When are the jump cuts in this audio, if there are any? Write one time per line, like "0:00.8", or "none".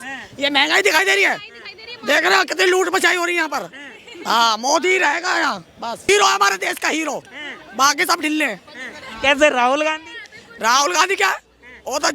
0:06.1